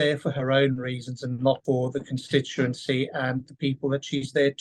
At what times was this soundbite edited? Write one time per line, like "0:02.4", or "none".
0:01.6

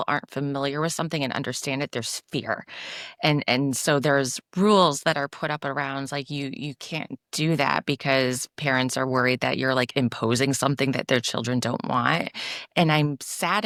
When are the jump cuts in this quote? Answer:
none

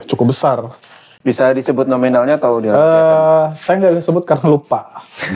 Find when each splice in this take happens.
none

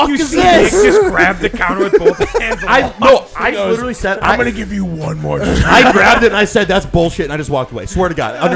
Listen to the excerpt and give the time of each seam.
none

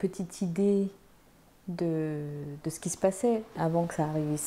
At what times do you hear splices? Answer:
0:03.6

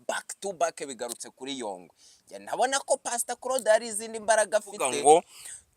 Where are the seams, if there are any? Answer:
0:04.8

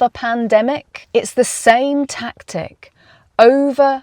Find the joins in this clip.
0:00.9

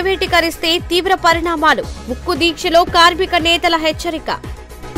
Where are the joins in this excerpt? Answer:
none

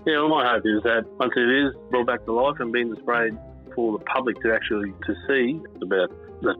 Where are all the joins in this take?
0:01.1
0:05.0
0:05.7

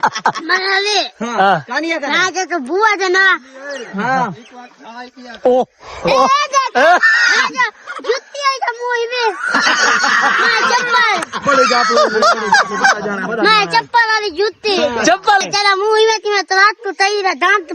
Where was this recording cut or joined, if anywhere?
0:15.4

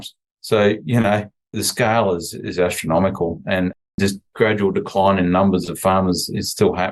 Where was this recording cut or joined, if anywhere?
none

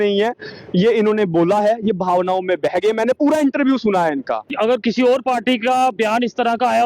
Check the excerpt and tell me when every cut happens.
0:04.5

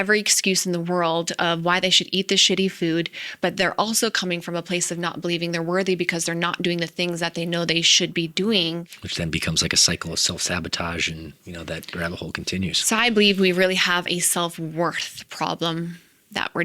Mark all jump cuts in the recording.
0:09.0

